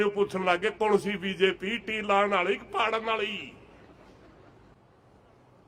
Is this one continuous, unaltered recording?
no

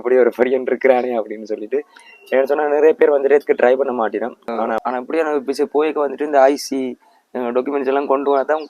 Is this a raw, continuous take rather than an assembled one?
no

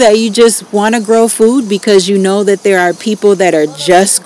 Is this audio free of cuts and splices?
yes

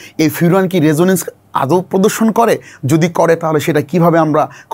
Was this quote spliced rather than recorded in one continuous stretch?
no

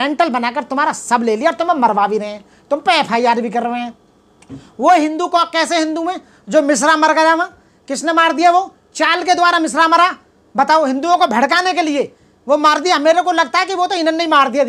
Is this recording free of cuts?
yes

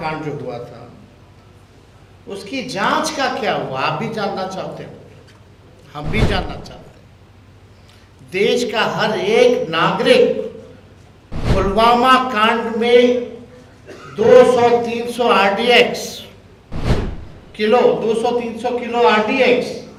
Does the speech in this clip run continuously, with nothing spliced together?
yes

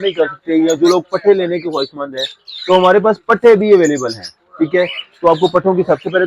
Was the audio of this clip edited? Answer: no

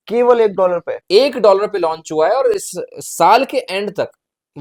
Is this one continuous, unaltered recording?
yes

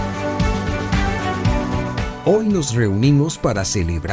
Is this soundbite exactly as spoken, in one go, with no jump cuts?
no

